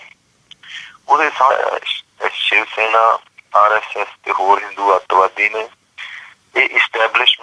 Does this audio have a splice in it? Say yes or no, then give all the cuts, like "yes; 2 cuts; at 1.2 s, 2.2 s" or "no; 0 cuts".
no; 0 cuts